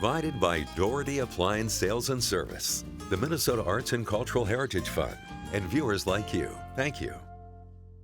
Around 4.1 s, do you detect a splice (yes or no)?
no